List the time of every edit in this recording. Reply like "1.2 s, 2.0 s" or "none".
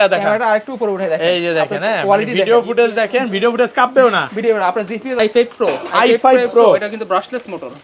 5.1 s